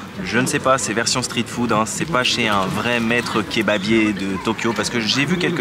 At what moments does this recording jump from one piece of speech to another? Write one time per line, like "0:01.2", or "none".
none

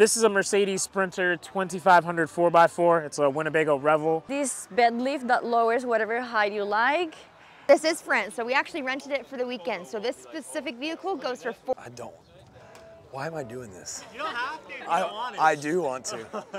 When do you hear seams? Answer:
0:04.3
0:07.6
0:11.7

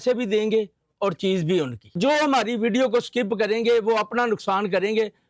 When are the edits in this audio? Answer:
0:02.0

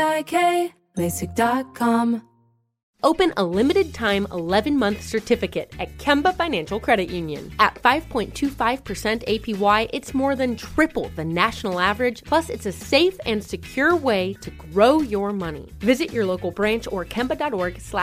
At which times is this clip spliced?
0:02.4

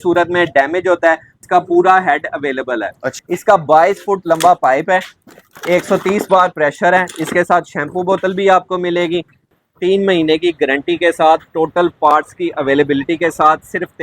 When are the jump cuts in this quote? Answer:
0:01.4
0:03.1
0:09.5

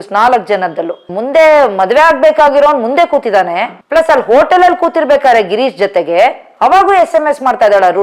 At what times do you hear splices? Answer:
0:00.9

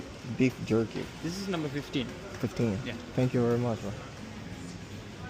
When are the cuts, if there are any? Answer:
0:04.2

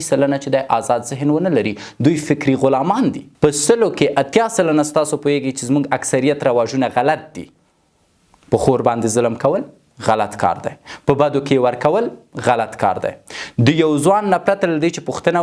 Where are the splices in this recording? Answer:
0:03.3

